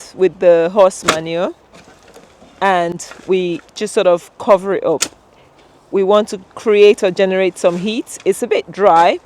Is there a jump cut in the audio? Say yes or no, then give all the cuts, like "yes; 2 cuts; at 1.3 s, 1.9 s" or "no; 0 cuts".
no; 0 cuts